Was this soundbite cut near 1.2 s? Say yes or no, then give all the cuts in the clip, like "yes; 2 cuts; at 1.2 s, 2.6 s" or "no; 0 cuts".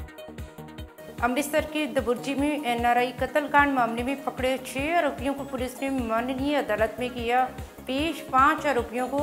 yes; 1 cut; at 1.2 s